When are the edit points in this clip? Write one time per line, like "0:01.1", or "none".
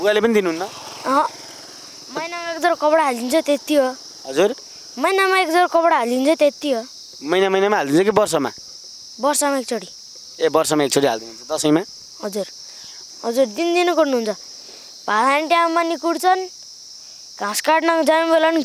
0:13.0

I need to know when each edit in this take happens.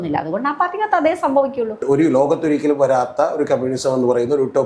0:01.8

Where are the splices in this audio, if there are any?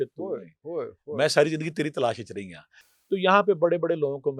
none

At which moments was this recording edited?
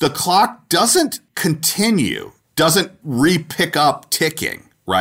0:01.2

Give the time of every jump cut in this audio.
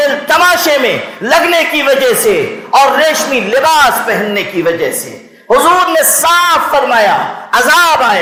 none

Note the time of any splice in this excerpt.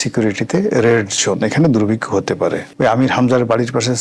0:02.7

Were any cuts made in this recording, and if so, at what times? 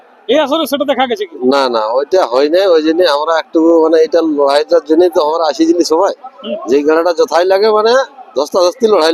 none

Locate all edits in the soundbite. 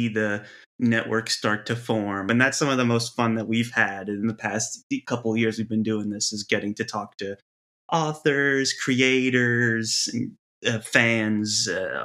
0:02.3

